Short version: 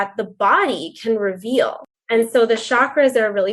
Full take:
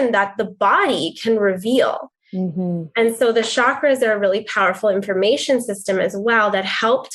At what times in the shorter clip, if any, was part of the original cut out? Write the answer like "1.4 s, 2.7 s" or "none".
2.0 s